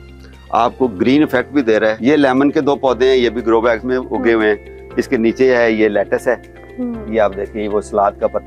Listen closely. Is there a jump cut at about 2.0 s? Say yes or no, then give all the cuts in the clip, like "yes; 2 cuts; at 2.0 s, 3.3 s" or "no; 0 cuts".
yes; 1 cut; at 2.0 s